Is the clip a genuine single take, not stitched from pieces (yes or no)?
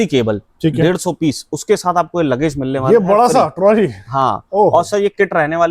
yes